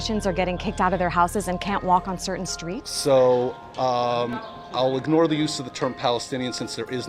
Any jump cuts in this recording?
no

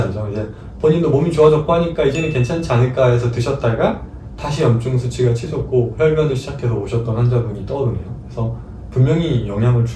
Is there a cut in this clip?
no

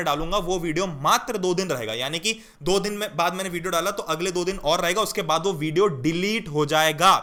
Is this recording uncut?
yes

